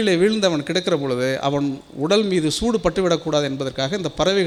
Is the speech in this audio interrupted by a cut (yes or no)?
no